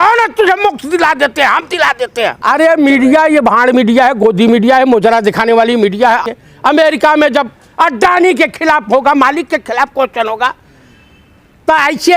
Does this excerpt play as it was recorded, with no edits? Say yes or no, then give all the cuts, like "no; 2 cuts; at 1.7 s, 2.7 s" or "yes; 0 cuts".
no; 2 cuts; at 2.4 s, 6.4 s